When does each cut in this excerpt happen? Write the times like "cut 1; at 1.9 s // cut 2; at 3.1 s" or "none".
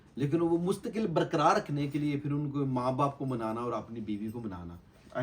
none